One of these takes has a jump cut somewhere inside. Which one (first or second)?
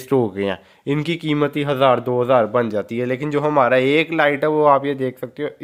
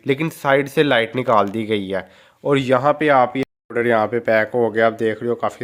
second